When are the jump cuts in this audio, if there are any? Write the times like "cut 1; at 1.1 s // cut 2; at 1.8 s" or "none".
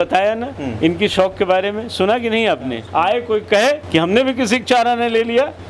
cut 1; at 2.8 s